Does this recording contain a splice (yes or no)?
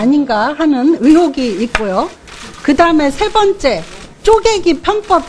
no